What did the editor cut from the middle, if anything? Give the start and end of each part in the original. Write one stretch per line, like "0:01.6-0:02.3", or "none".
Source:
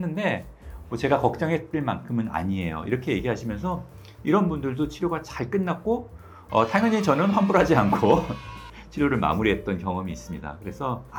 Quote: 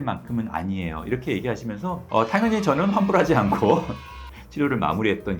0:03.8-0:06.4